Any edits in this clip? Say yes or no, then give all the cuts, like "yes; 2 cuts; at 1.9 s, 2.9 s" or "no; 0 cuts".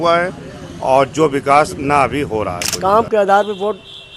yes; 1 cut; at 2.6 s